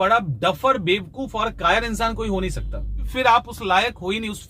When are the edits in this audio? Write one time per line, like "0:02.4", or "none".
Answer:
0:03.1